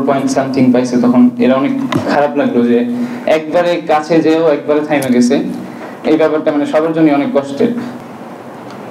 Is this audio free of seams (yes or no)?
no